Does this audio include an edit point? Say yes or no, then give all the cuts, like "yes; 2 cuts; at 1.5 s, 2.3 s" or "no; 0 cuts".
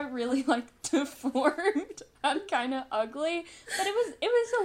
no; 0 cuts